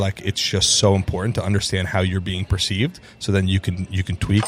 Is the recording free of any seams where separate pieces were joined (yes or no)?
yes